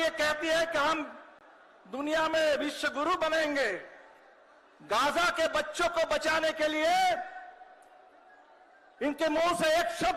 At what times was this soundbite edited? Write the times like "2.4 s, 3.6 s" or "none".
none

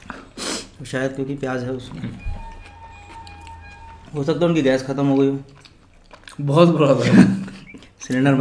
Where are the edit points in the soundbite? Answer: 4.1 s

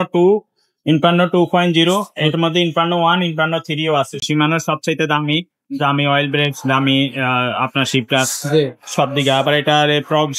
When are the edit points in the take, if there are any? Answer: 4.2 s

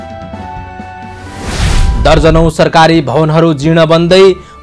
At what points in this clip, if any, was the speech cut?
1.0 s

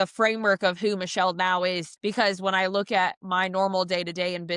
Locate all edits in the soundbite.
1.9 s

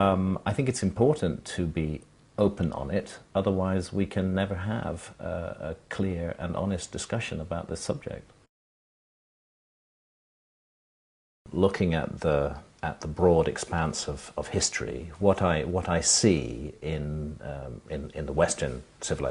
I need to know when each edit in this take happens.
6.7 s

